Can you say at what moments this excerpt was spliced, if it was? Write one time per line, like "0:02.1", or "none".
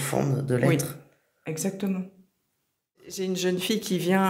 0:03.2